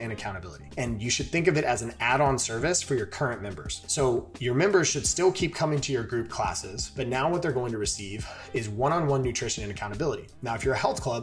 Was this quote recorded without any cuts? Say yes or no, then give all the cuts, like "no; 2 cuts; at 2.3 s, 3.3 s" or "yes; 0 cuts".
yes; 0 cuts